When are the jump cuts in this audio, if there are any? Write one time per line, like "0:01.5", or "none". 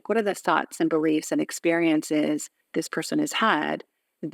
0:02.6